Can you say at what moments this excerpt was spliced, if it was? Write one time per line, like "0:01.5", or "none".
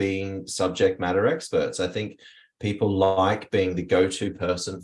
none